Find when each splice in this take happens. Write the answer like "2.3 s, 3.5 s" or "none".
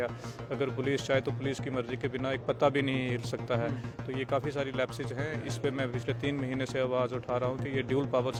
none